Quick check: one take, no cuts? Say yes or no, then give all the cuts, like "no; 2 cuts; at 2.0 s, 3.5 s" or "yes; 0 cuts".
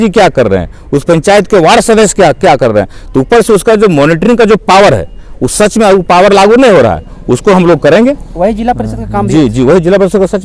yes; 0 cuts